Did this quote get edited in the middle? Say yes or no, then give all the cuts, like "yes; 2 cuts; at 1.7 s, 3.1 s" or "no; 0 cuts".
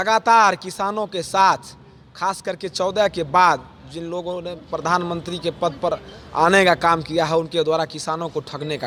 no; 0 cuts